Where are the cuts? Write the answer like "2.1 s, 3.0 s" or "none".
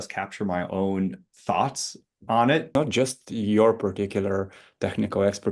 2.7 s